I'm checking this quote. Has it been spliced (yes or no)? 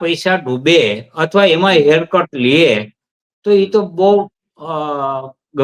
no